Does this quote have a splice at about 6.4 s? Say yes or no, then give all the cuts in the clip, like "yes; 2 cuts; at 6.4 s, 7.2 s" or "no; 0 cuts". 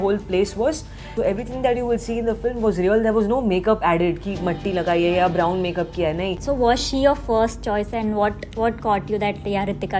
yes; 2 cuts; at 1.1 s, 6.4 s